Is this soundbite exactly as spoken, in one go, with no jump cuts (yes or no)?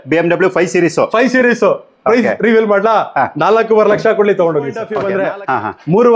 no